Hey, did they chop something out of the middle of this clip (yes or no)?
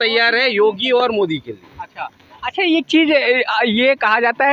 no